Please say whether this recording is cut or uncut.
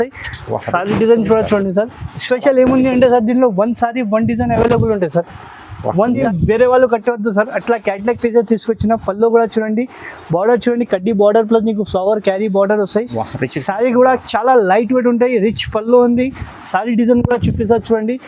cut